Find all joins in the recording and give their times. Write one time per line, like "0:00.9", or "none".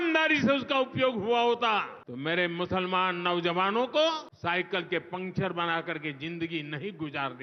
0:02.0
0:04.3